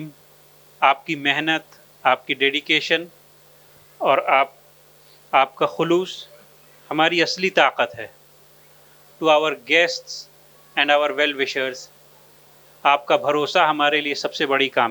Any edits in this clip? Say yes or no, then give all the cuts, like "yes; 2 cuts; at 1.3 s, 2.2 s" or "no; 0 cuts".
no; 0 cuts